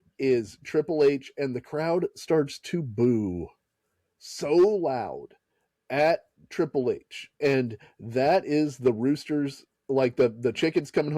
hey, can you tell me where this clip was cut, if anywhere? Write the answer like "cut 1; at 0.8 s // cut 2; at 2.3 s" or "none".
none